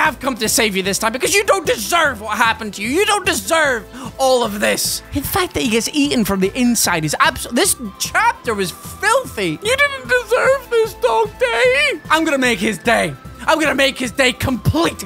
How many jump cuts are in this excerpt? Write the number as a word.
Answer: zero